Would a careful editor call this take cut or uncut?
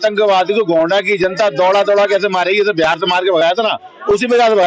uncut